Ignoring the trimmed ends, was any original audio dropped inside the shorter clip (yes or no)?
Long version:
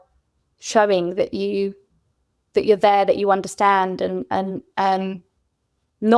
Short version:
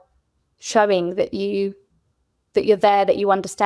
no